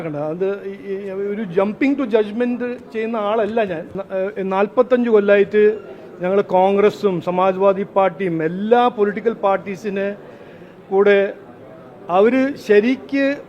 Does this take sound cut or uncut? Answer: cut